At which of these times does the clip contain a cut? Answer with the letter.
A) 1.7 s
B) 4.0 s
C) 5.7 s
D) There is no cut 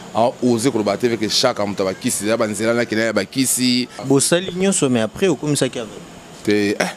B